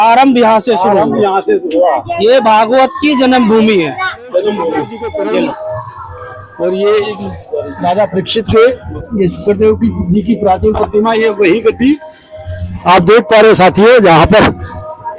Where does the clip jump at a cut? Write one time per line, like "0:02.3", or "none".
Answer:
0:06.5